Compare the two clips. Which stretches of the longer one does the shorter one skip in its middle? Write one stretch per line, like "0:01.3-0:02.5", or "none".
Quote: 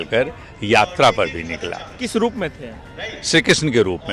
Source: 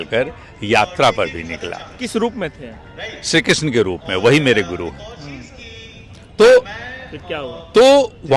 none